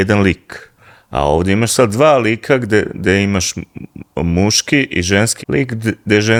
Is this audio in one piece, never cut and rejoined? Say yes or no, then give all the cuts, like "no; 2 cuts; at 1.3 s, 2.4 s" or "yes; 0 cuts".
yes; 0 cuts